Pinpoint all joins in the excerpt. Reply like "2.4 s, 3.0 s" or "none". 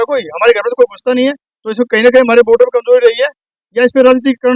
none